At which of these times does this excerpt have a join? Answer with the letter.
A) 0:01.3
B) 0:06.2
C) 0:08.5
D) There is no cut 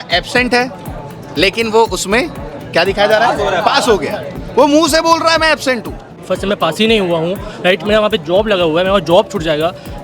B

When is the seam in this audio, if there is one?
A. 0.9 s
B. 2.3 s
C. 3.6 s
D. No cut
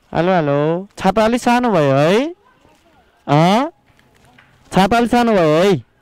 D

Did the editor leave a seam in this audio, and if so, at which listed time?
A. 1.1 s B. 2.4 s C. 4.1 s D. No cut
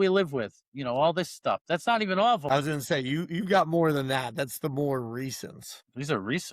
B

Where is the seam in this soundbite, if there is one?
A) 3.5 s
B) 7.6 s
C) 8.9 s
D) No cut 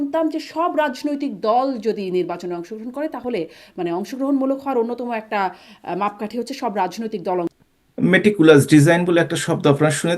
B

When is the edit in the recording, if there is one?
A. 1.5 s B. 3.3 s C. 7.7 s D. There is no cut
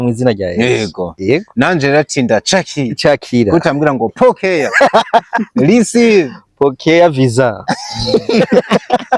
D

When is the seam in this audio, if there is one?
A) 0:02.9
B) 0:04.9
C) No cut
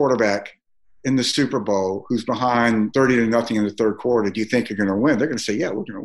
A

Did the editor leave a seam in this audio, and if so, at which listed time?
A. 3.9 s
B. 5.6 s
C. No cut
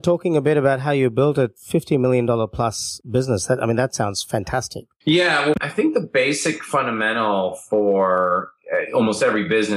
B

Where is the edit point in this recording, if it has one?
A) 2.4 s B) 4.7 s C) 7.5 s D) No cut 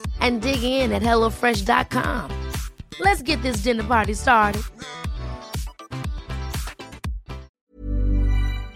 C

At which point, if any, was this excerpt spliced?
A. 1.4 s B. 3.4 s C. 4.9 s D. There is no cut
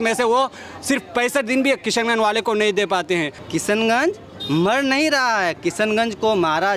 B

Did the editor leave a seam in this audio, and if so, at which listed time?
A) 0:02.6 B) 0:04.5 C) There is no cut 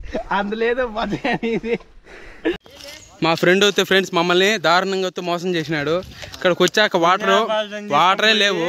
A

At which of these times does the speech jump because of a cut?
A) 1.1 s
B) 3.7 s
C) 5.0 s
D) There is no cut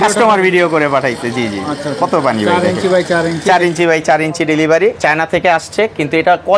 C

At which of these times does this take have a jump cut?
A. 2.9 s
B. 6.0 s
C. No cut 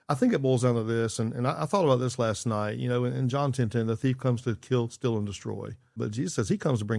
B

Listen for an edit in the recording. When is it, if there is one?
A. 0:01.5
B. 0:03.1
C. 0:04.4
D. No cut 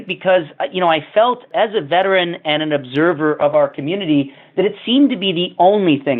A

